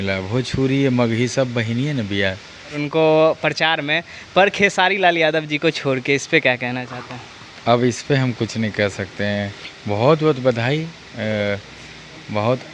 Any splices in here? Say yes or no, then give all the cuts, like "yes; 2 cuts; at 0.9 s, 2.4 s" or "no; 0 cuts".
yes; 2 cuts; at 2.8 s, 9.7 s